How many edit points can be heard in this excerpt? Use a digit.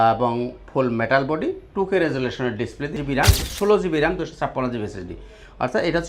1